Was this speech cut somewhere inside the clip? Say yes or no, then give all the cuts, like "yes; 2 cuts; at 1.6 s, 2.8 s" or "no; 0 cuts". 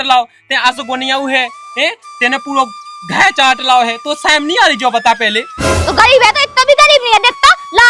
yes; 1 cut; at 5.8 s